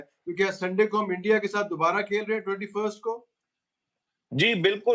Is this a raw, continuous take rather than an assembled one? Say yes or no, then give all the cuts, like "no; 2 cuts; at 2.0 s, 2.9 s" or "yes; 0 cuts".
yes; 0 cuts